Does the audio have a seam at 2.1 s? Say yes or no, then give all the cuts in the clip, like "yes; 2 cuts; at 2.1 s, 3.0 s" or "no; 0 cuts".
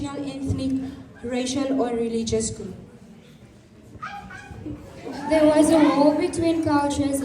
no; 0 cuts